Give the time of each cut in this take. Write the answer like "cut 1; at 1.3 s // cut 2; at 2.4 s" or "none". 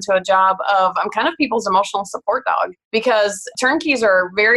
cut 1; at 2.8 s // cut 2; at 3.5 s